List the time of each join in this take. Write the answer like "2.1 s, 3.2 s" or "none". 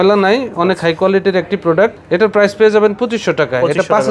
none